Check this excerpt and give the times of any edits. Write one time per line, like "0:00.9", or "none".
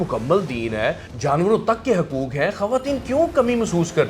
0:01.1